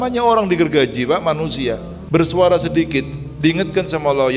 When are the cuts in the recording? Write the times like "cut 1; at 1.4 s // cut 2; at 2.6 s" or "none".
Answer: cut 1; at 1.9 s